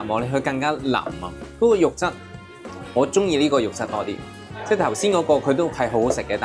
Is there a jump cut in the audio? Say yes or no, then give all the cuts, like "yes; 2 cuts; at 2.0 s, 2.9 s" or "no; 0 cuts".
no; 0 cuts